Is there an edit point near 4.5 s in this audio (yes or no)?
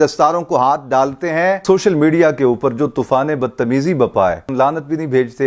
yes